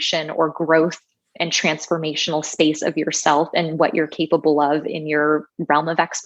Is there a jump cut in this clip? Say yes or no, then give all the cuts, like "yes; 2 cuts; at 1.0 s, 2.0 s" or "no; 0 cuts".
no; 0 cuts